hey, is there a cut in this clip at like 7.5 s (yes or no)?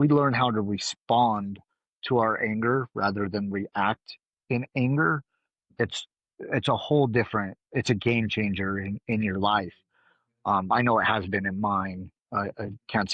no